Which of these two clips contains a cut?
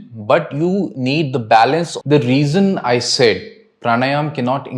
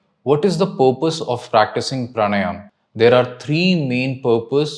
first; 1 cut; at 1.9 s

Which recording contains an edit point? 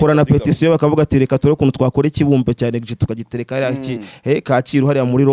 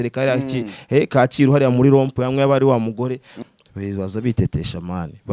second; 1 cut; at 3.3 s

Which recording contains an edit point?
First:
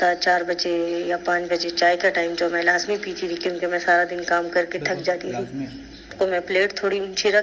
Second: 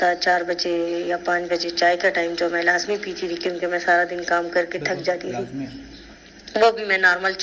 first; 1 cut; at 6.1 s

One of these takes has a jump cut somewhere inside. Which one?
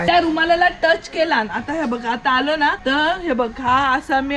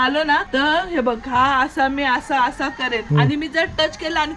second; 1 cut; at 3.0 s

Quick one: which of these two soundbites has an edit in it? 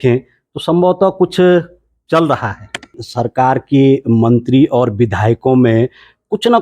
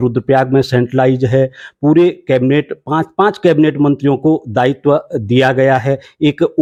first; 1 cut; at 3.1 s

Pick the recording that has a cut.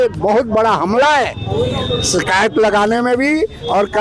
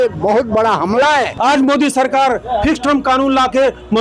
second; 1 cut; at 1.3 s

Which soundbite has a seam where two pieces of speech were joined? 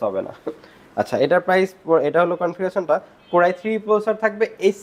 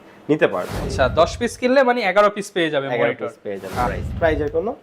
second; 2 cuts; at 0.8 s, 3.9 s

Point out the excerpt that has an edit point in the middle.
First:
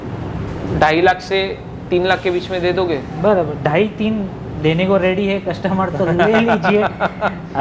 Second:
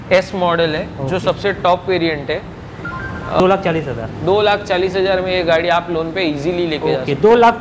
second; 1 cut; at 3.4 s

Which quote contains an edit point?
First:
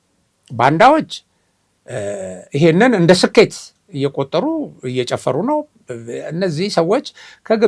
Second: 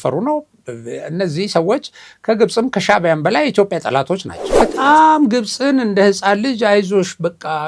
second; 1 cut; at 4.4 s

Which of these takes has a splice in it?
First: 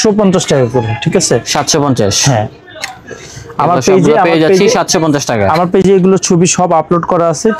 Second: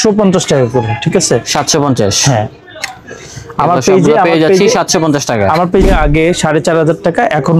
second; 1 cut; at 5.8 s

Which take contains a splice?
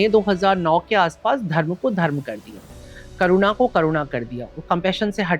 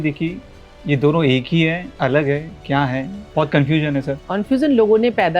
second; 2 cuts; at 3.2 s, 4.2 s

